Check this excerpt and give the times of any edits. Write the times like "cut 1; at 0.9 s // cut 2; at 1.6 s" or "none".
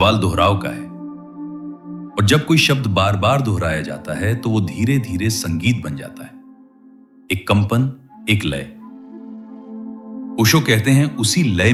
none